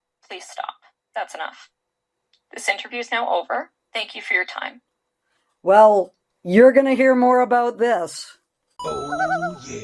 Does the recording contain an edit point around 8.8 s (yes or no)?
yes